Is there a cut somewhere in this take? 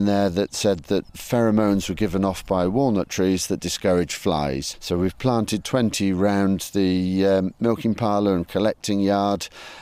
no; 0 cuts

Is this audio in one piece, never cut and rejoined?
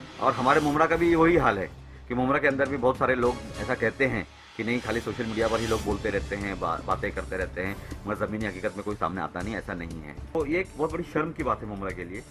no; 1 cut; at 10.4 s

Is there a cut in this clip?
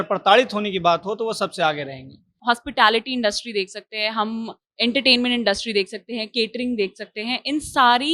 yes; 1 cut; at 2.4 s

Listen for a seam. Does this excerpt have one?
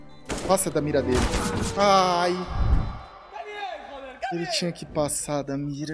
no; 0 cuts

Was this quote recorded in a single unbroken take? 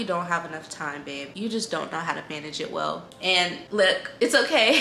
yes; 0 cuts

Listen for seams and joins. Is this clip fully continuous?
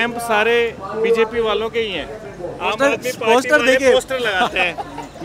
yes; 0 cuts

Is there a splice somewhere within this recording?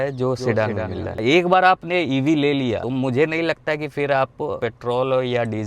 yes; 3 cuts; at 1.0 s, 2.8 s, 4.6 s

